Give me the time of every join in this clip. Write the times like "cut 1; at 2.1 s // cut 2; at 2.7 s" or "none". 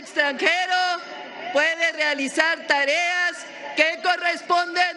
none